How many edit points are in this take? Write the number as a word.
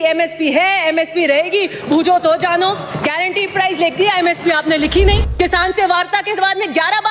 one